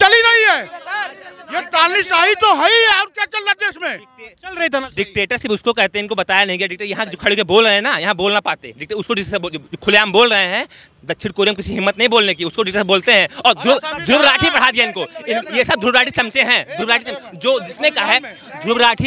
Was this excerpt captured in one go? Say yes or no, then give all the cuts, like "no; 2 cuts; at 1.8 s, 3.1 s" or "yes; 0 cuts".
yes; 0 cuts